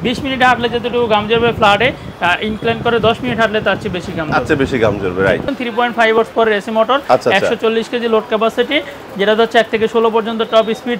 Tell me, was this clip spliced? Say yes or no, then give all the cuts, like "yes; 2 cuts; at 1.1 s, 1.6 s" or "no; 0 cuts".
yes; 1 cut; at 5.5 s